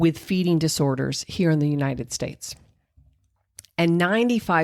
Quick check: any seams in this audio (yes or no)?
no